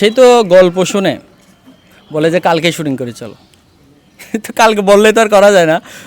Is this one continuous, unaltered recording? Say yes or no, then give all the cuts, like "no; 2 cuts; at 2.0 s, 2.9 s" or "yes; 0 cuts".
yes; 0 cuts